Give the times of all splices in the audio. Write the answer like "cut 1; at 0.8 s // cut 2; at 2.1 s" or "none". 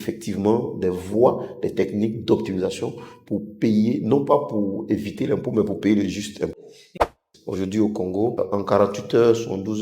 cut 1; at 7.1 s // cut 2; at 8.3 s

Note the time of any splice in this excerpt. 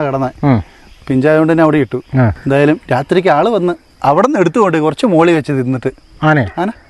cut 1; at 2.4 s

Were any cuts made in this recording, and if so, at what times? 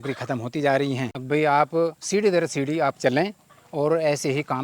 cut 1; at 1.1 s

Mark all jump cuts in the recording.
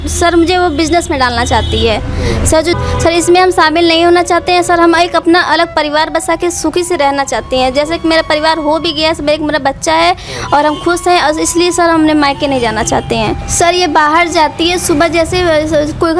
cut 1; at 13.4 s

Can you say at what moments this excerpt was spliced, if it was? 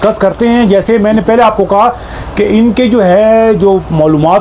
none

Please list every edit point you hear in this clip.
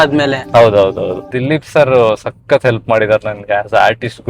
cut 1; at 1.5 s

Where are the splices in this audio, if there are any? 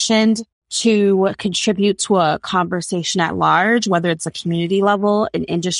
none

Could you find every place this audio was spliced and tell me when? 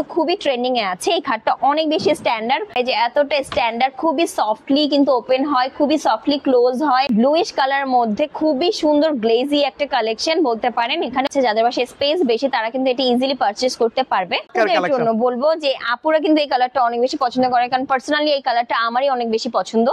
cut 1; at 2.7 s // cut 2; at 7.1 s // cut 3; at 11.3 s // cut 4; at 14.5 s

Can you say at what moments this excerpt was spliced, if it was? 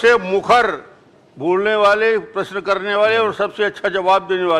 none

